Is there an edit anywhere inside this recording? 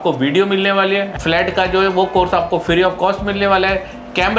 yes; 1 cut; at 1.1 s

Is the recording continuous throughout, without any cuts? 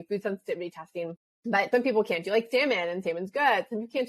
yes; 0 cuts

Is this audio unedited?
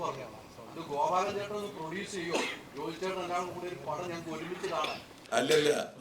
no; 1 cut; at 5.1 s

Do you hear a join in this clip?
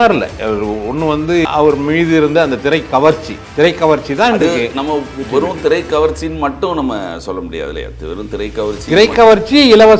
yes; 1 cut; at 1.4 s

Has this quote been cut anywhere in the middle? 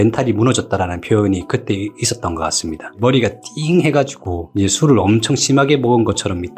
yes; 1 cut; at 2.8 s

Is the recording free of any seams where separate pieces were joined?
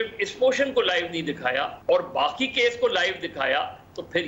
no; 1 cut; at 1.7 s

